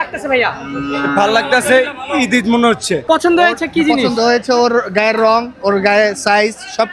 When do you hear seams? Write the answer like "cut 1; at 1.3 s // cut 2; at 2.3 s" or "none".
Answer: cut 1; at 3.0 s